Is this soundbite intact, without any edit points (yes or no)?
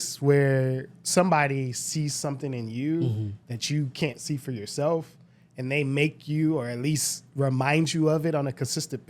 yes